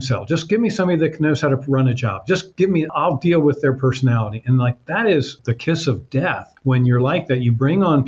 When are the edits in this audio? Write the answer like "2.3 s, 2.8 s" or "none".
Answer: 2.9 s, 6.5 s